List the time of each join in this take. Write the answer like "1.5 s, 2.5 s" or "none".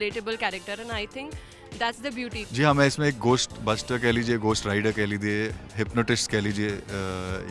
2.4 s, 5.6 s